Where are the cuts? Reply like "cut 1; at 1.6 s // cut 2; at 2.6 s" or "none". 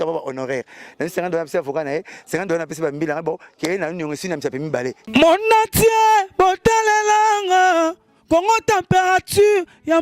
cut 1; at 5.0 s